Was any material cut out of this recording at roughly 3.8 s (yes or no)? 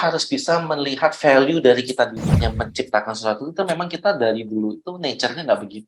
no